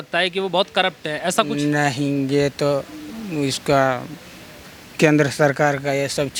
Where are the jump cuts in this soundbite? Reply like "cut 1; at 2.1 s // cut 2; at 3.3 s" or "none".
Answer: none